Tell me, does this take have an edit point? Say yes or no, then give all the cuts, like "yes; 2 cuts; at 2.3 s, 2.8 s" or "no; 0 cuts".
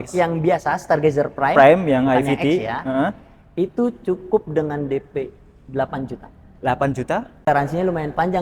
yes; 1 cut; at 7.4 s